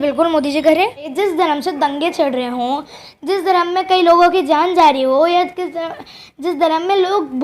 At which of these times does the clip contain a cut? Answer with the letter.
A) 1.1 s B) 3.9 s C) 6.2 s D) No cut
A